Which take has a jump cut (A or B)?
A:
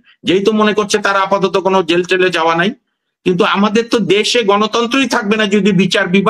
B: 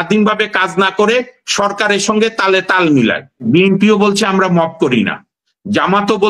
B